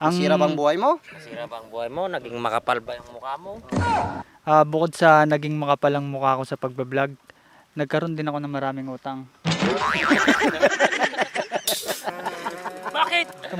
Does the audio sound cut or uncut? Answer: uncut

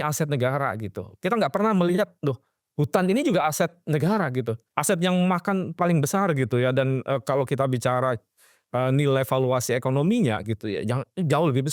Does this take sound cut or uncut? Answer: cut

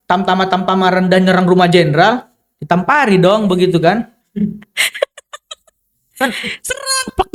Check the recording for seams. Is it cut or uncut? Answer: uncut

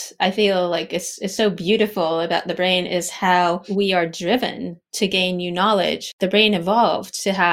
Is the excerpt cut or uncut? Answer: cut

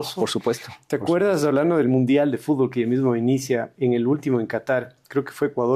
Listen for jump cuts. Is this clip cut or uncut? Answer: uncut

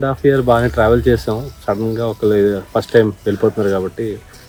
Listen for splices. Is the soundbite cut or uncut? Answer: uncut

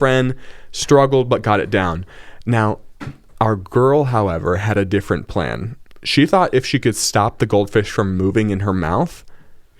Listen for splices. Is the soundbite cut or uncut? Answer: uncut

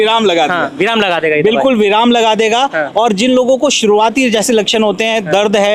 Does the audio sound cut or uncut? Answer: uncut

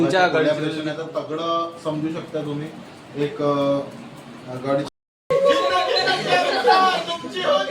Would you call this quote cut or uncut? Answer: uncut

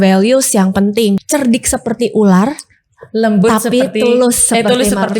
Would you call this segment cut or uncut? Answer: cut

